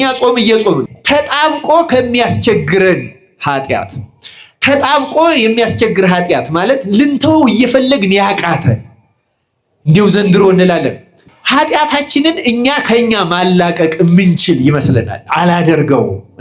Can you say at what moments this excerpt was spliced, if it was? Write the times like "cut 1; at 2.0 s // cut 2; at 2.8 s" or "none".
cut 1; at 0.9 s // cut 2; at 11.2 s